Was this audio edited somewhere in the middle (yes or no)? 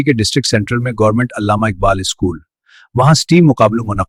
no